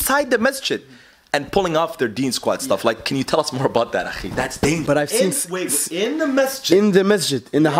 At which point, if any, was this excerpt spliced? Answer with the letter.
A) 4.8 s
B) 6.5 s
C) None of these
A